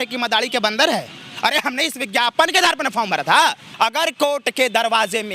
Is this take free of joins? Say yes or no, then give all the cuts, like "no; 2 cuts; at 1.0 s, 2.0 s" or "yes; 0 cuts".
no; 1 cut; at 3.6 s